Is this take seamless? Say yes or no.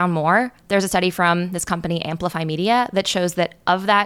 yes